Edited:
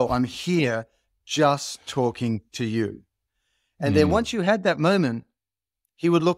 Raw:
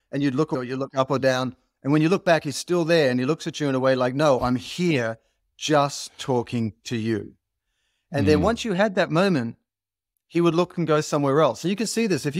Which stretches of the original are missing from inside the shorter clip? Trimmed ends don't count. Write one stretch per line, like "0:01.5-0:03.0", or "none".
none